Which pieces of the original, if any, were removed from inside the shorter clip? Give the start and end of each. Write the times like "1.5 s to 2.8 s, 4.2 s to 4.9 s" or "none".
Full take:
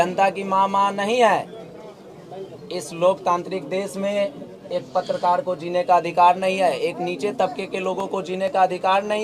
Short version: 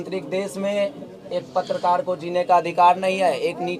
none